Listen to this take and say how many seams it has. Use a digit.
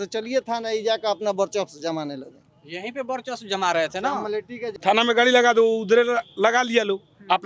1